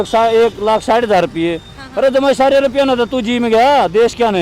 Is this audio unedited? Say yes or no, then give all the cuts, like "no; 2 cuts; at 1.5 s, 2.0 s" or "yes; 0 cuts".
yes; 0 cuts